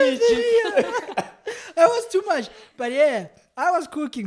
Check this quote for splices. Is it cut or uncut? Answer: uncut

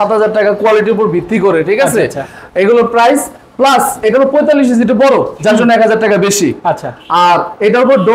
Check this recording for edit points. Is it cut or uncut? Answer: uncut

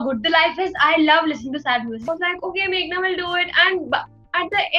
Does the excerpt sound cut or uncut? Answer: cut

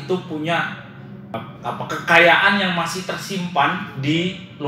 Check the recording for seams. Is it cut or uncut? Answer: cut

